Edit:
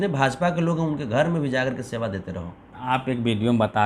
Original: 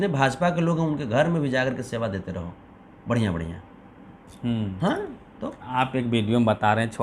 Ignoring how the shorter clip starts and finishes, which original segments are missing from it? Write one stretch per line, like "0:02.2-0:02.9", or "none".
0:02.7-0:05.5